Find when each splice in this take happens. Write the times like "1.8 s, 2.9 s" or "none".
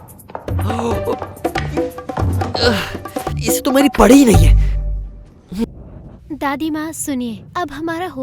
5.6 s